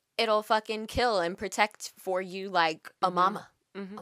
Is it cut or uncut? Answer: cut